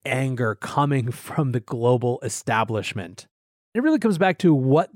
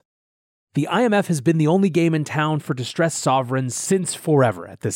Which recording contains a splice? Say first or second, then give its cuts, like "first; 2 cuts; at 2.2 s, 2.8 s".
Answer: first; 1 cut; at 3.8 s